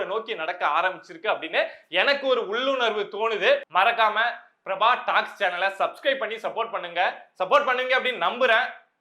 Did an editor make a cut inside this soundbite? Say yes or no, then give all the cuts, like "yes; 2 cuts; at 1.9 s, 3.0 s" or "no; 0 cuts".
yes; 1 cut; at 3.7 s